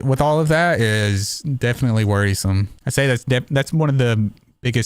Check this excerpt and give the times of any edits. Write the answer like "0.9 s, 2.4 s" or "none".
2.7 s